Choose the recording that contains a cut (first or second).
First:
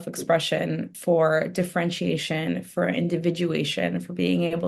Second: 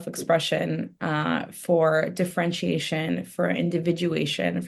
first